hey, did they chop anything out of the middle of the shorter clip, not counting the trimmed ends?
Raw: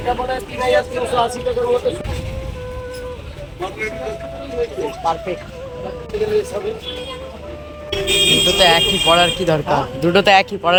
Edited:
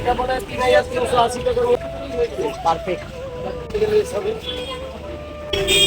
yes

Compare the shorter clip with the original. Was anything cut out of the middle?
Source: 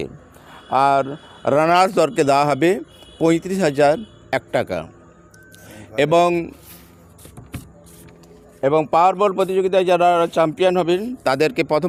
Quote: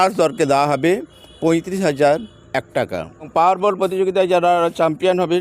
yes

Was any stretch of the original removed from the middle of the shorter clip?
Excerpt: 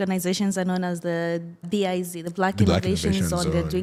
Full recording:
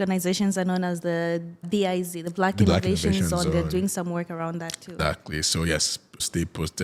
no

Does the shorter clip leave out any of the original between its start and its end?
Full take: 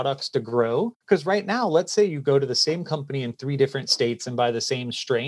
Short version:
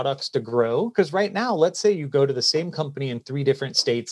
yes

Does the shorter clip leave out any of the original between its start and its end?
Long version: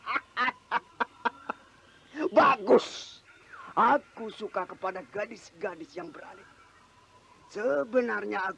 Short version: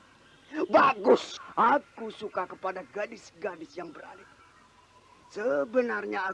yes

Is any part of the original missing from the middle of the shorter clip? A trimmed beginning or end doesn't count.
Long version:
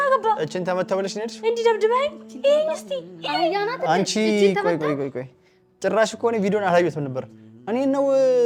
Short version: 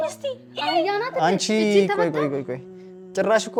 no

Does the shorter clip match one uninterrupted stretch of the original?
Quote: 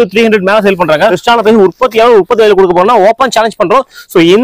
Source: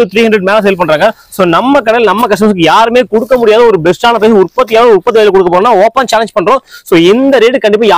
no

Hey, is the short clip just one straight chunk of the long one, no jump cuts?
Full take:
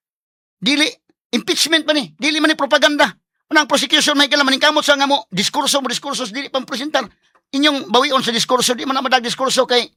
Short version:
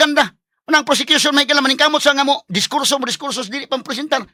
yes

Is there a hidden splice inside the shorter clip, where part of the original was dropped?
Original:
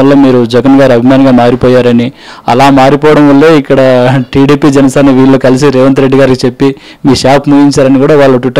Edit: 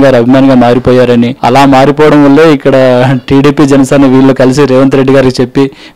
yes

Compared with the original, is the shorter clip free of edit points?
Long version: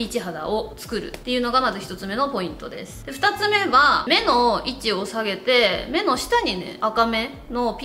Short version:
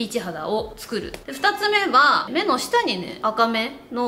no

